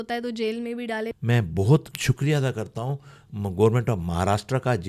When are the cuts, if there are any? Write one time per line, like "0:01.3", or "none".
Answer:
0:01.2
0:01.9